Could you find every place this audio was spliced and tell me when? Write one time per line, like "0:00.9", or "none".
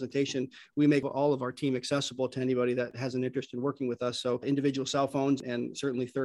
0:01.0
0:02.9
0:05.4